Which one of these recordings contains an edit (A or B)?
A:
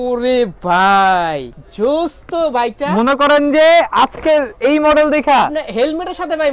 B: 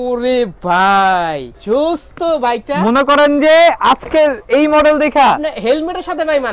B